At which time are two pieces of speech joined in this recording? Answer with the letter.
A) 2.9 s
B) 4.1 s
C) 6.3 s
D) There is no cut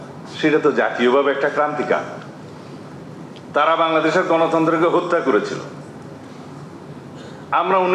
C